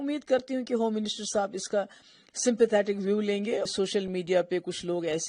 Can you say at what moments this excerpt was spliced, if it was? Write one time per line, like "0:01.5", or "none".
0:03.7